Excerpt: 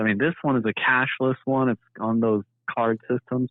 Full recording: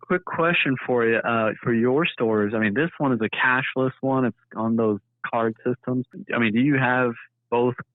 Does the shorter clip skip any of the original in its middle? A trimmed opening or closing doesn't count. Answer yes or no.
no